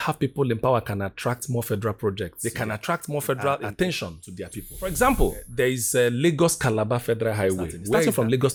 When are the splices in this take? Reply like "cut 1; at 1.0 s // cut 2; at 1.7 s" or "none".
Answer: none